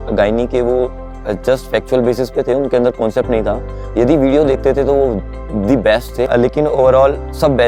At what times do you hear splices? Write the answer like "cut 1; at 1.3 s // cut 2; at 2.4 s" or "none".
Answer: cut 1; at 6.3 s